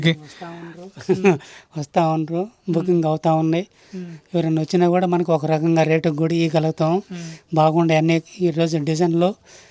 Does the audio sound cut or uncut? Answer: uncut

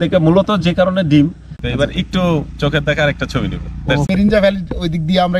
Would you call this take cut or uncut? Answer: cut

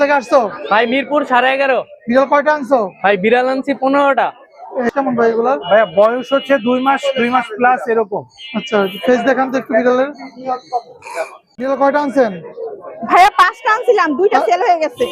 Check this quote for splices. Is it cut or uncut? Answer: cut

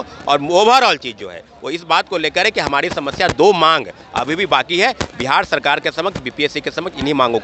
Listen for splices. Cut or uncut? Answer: uncut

